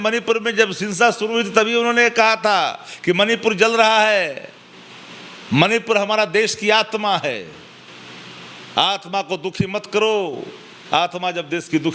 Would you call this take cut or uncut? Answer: uncut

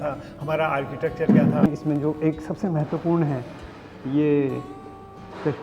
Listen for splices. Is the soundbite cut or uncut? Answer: cut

